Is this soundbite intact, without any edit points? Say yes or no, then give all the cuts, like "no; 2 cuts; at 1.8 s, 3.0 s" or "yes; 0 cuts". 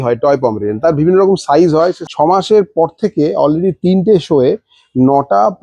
no; 1 cut; at 2.0 s